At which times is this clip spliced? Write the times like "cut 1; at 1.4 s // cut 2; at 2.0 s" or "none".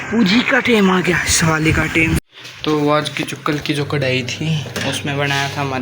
cut 1; at 2.2 s